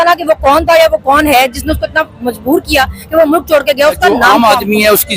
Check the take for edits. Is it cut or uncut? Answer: cut